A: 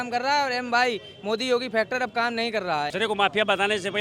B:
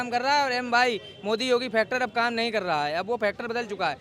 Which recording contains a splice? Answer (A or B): A